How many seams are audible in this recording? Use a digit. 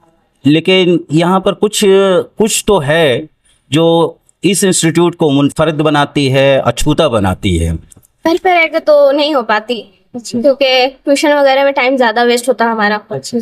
1